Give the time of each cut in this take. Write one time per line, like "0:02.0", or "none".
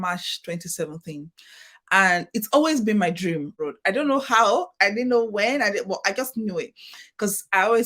0:03.5

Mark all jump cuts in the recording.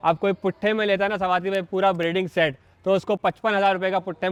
none

